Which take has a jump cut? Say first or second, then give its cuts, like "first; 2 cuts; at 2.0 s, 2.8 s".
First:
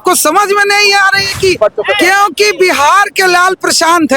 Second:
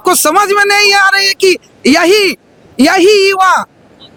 first; 1 cut; at 1.6 s